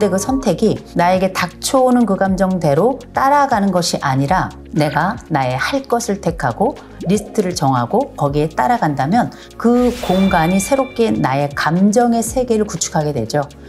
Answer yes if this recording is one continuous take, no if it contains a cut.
no